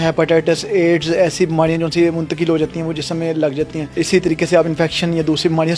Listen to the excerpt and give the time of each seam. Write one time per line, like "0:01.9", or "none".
0:04.0

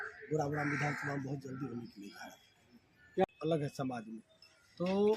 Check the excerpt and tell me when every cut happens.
0:03.2

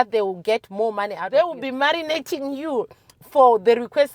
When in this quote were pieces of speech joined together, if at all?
0:01.2

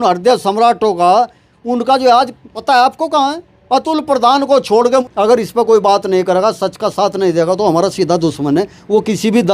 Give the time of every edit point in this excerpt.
0:02.5
0:05.0

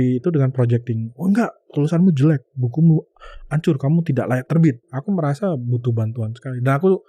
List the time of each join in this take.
0:04.8

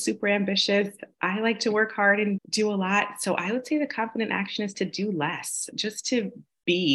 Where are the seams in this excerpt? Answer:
0:02.4
0:05.7

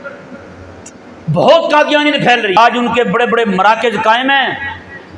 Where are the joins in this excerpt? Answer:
0:02.6

